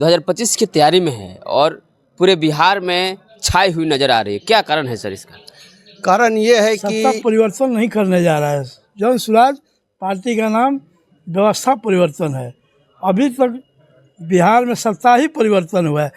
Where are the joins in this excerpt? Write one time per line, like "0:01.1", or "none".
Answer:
0:06.9